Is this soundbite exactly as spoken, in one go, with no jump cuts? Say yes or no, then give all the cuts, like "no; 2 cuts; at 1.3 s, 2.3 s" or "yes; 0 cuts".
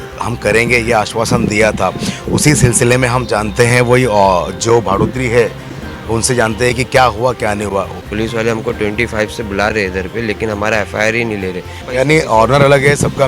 no; 2 cuts; at 8.0 s, 11.8 s